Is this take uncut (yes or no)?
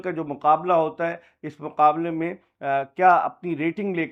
yes